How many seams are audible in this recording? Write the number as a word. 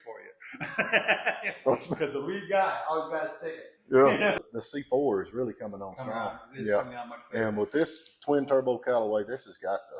one